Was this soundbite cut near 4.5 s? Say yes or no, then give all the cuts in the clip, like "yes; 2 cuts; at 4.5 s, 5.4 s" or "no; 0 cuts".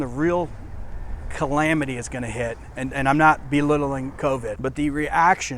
yes; 1 cut; at 4.5 s